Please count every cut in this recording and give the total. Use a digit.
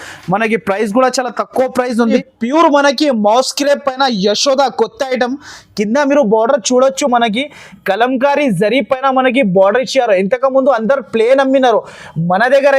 1